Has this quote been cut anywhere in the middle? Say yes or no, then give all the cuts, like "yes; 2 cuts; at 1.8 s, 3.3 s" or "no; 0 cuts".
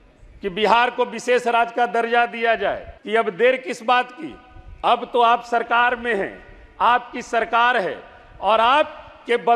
yes; 1 cut; at 2.9 s